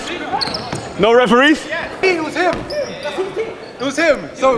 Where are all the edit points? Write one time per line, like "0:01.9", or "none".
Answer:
0:02.0